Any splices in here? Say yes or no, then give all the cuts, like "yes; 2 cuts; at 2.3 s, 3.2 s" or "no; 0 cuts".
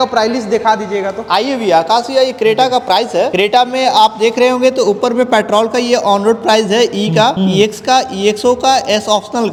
no; 0 cuts